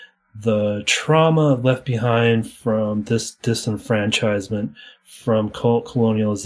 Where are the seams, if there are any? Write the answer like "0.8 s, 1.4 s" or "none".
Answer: none